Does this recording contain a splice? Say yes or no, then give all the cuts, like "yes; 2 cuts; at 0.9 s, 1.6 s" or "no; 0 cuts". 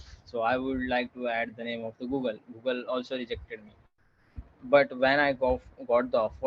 yes; 1 cut; at 4.3 s